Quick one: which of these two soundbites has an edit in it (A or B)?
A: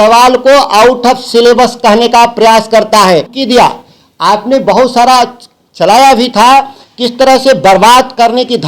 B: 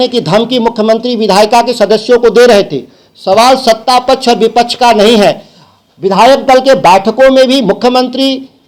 A